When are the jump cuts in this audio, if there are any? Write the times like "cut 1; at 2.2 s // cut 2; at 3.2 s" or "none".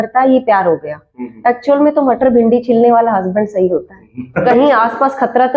cut 1; at 4.4 s